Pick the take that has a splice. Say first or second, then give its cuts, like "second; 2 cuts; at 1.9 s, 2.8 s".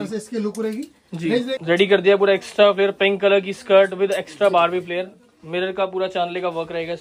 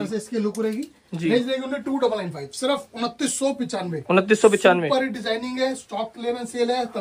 first; 1 cut; at 1.5 s